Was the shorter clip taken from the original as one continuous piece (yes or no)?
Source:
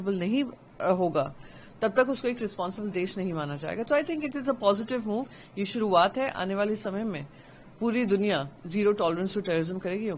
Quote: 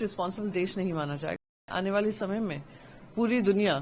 no